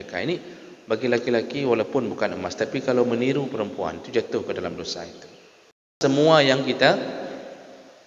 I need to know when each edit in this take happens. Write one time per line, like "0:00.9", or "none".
0:05.9

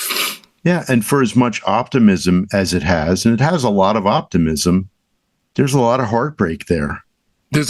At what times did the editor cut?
none

